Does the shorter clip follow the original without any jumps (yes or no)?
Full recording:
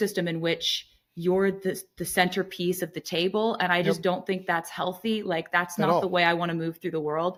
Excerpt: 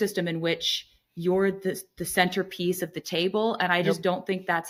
yes